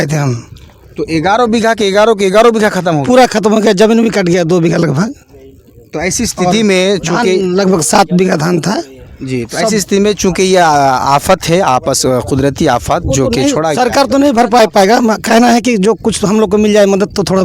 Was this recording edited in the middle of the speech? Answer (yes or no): no